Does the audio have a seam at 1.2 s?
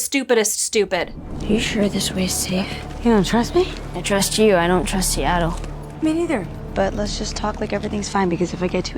yes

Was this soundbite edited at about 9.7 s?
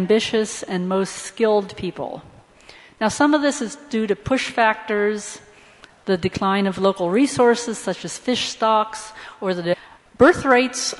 no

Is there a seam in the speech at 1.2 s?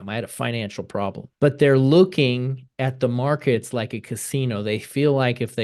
yes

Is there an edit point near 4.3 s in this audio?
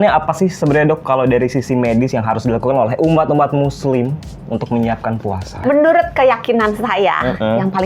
no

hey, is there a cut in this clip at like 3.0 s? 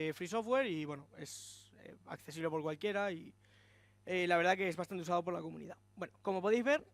yes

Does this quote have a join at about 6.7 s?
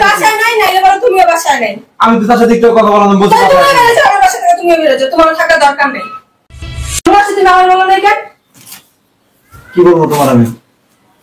yes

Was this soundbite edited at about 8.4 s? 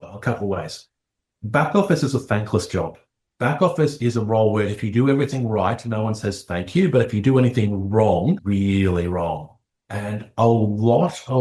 yes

